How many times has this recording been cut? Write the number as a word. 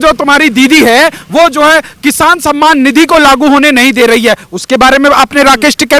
zero